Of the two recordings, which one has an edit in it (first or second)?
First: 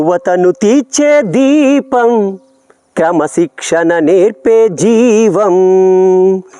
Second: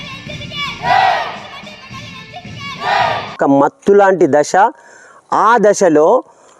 second